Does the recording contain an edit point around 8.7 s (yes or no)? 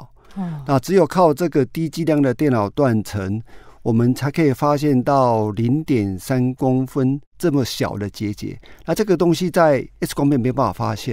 no